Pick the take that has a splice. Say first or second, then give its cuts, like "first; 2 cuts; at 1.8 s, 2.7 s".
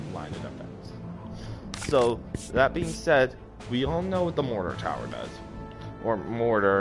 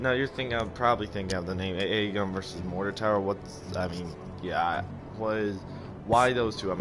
second; 1 cut; at 4.8 s